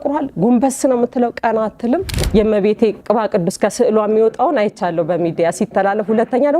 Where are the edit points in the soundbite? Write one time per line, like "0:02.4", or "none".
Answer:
0:02.2
0:03.0